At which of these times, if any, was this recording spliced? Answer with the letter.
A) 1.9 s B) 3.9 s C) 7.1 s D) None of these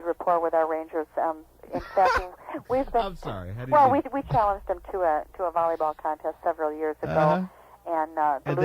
B